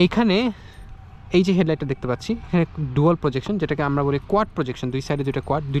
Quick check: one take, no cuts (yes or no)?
yes